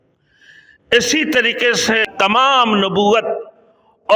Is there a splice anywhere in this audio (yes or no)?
yes